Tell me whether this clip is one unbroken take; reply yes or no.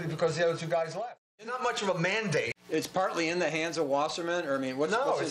no